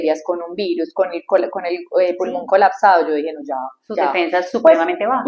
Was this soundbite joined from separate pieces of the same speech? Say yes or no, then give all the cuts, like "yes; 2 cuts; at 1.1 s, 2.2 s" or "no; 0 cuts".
no; 0 cuts